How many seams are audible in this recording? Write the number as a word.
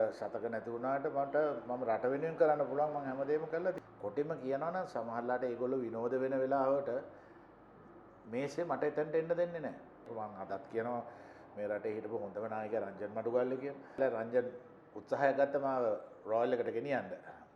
three